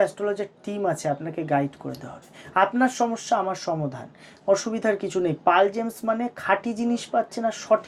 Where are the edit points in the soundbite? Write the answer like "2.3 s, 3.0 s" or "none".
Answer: none